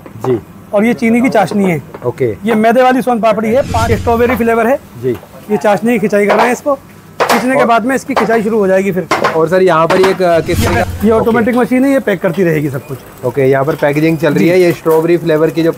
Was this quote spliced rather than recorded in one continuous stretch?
yes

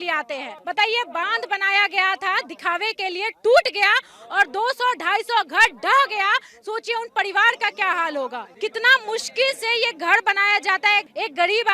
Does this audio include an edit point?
yes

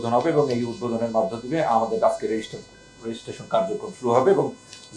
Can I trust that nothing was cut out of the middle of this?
yes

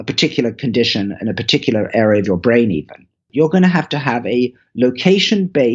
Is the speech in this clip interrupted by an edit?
yes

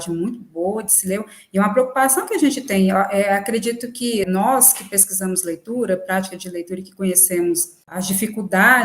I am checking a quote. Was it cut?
yes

